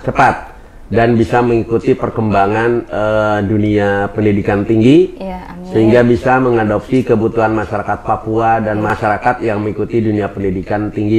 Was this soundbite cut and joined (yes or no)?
yes